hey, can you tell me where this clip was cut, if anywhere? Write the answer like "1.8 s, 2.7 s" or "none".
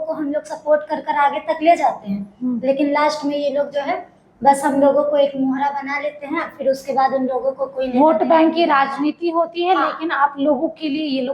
none